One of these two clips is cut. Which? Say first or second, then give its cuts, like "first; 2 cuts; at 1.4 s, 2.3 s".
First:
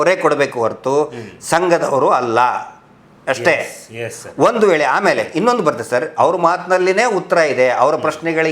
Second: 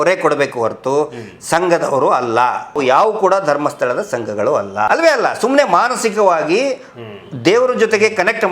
second; 2 cuts; at 2.8 s, 4.9 s